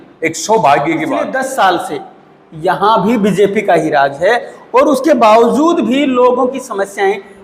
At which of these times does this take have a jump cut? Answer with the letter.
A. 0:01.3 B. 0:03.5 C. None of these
A